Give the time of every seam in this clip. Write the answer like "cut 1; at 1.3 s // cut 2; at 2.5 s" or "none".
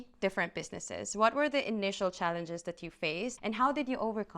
cut 1; at 3.4 s